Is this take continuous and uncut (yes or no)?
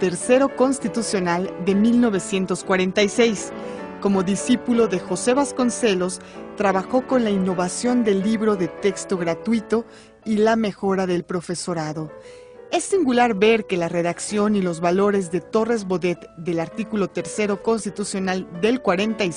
yes